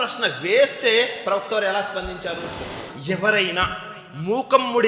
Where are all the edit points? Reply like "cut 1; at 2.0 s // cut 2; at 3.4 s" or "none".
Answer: cut 1; at 2.9 s